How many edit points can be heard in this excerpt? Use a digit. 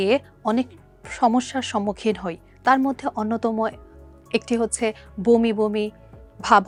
0